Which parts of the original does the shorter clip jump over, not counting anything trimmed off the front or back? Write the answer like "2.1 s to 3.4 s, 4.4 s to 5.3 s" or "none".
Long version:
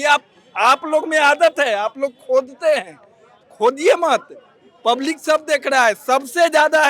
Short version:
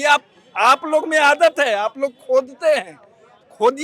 none